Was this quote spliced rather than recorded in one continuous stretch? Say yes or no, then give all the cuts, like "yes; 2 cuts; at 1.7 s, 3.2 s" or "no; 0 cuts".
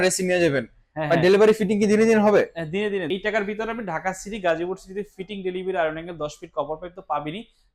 yes; 1 cut; at 3.1 s